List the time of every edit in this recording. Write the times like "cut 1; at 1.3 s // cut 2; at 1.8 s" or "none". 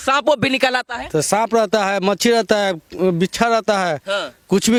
none